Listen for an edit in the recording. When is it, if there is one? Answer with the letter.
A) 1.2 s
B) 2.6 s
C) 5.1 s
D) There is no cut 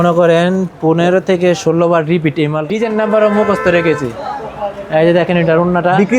B